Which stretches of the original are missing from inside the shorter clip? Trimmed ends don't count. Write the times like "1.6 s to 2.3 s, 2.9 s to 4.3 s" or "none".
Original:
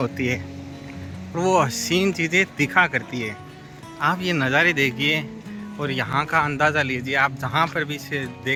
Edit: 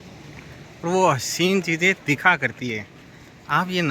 none